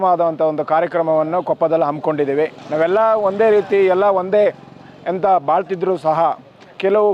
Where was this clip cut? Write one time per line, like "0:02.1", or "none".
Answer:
0:02.6